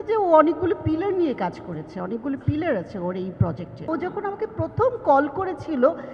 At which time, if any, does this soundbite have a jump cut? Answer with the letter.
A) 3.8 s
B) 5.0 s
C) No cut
A